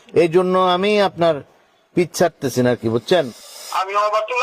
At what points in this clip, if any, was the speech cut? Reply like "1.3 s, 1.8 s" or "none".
3.4 s